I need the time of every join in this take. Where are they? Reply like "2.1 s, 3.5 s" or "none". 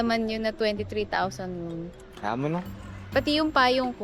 2.0 s